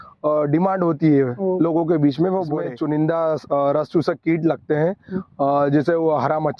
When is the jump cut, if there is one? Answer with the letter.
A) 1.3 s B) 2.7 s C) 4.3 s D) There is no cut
B